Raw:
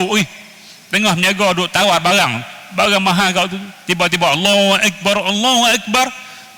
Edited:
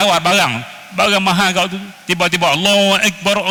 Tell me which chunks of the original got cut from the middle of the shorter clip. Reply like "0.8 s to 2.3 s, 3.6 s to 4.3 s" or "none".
none